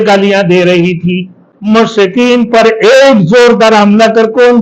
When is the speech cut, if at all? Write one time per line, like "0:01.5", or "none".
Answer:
0:01.5